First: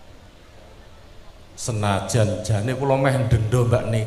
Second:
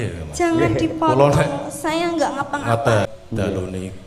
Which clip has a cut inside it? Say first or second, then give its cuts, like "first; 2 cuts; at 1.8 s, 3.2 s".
second; 1 cut; at 3.1 s